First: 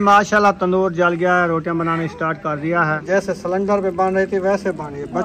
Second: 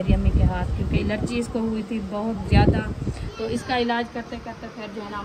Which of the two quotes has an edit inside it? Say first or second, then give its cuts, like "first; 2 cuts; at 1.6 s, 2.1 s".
first; 1 cut; at 3.0 s